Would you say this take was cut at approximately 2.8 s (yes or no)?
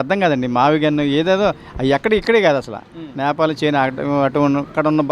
no